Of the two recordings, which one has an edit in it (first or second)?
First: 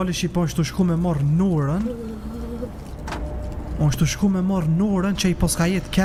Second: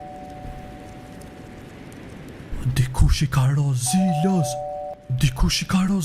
second